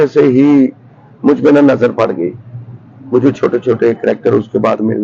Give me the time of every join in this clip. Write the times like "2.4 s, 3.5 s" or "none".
none